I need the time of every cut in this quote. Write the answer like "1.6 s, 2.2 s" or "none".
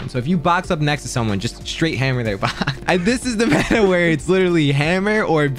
2.8 s